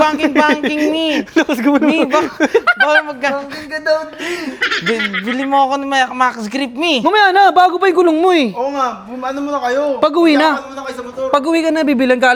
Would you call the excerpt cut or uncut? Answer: uncut